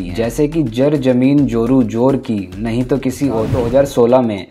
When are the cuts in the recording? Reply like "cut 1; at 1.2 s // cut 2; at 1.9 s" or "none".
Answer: cut 1; at 3.5 s